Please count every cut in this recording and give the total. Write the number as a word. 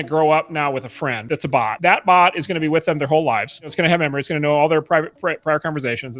two